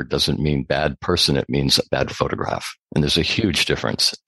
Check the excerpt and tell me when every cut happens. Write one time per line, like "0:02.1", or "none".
none